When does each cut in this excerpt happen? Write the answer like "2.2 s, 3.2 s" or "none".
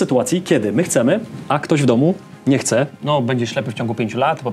3.0 s